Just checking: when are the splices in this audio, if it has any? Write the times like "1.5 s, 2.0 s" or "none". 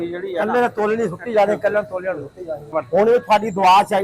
2.7 s